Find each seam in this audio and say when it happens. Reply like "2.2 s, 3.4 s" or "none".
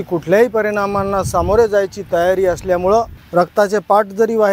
3.2 s

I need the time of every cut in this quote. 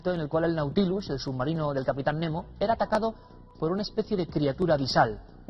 none

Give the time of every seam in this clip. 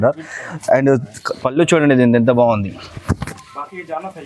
none

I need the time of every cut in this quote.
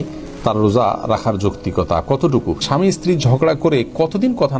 2.6 s

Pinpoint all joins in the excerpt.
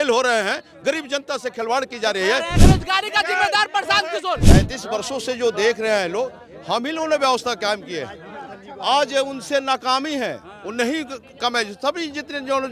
2.6 s, 4.4 s

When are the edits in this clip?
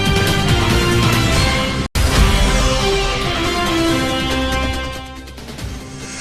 1.7 s

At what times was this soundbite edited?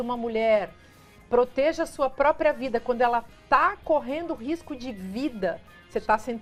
none

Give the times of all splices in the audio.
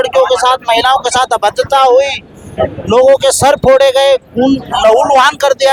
none

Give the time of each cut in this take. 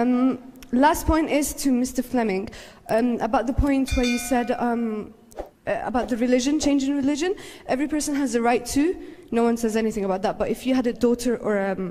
none

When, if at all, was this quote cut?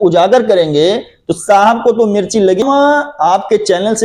2.6 s

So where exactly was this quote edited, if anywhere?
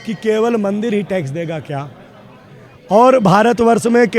none

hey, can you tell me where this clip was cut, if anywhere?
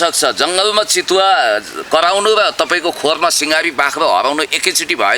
none

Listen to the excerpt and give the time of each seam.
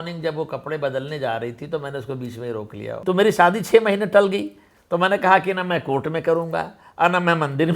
3.0 s

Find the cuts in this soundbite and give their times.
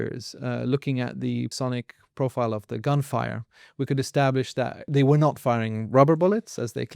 1.5 s, 4.9 s

